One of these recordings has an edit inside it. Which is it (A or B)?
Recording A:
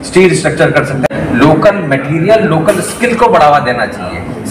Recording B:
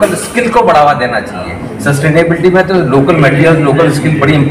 A